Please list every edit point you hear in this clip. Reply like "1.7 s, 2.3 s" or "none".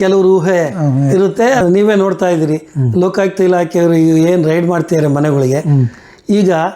1.6 s